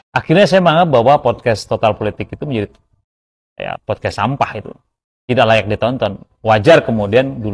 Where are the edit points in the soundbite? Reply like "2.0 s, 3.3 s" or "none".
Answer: none

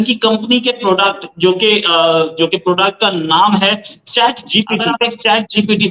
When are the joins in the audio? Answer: 4.8 s

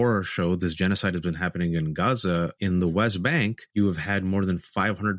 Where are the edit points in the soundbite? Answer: 2.5 s, 3.6 s

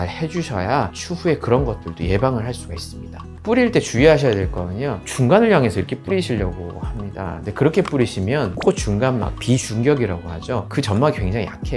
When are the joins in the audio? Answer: 3.3 s

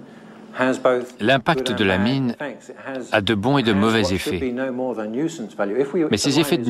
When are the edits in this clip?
none

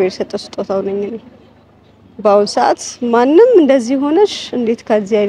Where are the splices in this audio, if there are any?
none

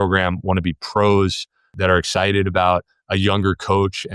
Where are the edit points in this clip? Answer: 1.7 s

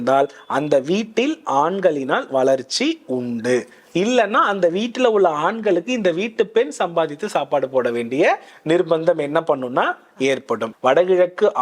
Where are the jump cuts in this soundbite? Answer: 10.7 s

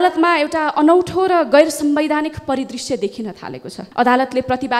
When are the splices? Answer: none

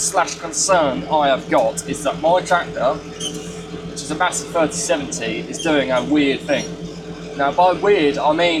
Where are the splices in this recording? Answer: none

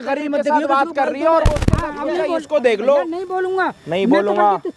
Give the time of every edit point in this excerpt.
none

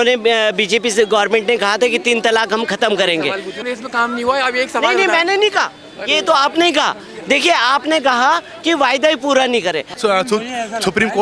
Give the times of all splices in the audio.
3.6 s, 9.9 s

